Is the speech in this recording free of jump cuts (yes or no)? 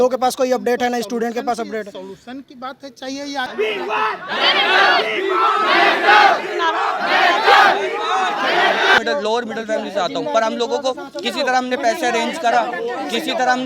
no